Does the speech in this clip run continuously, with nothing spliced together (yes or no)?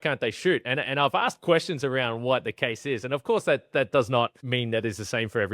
no